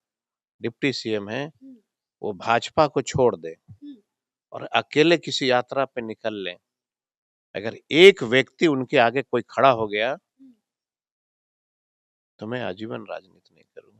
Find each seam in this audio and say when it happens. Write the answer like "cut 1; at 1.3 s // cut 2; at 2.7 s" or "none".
none